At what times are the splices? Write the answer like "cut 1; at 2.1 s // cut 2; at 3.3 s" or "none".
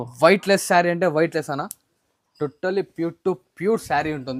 none